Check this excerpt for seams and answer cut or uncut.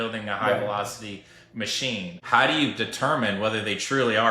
cut